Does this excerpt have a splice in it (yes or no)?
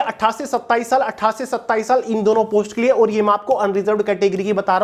no